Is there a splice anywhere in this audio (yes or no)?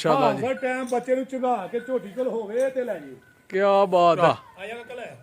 yes